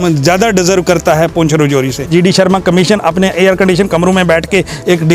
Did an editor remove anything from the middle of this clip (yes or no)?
yes